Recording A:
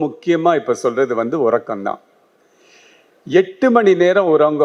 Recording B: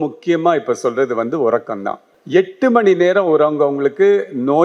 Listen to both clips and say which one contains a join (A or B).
B